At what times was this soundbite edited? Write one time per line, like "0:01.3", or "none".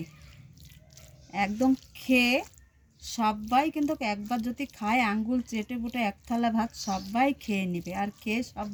none